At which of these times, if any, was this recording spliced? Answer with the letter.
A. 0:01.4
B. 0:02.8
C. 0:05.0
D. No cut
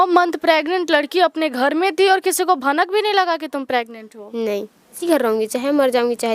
C